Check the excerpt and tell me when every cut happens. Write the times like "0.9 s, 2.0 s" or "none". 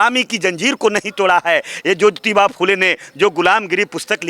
none